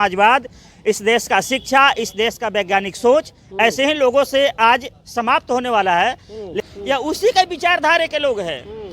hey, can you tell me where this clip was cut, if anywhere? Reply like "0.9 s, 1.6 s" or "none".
6.6 s